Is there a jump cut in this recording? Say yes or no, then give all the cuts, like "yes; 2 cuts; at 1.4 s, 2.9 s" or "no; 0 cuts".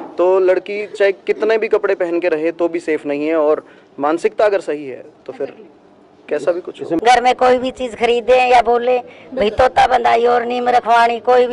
yes; 1 cut; at 7.0 s